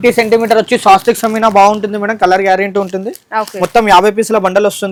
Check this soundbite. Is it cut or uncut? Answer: uncut